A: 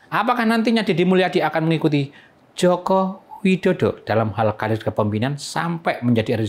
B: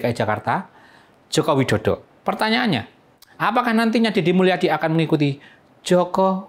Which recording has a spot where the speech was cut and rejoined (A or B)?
B